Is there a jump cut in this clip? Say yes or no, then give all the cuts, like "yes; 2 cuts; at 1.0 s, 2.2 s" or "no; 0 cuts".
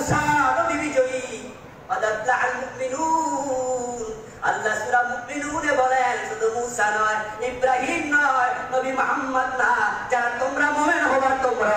no; 0 cuts